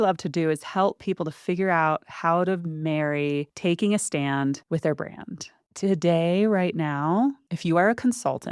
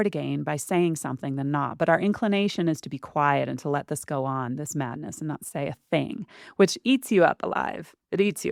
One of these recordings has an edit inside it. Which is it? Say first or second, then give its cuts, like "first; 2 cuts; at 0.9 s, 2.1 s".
first; 4 cuts; at 3.5 s, 4.6 s, 5.5 s, 7.5 s